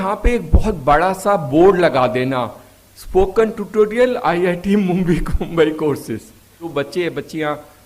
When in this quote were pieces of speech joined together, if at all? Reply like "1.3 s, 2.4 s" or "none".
6.7 s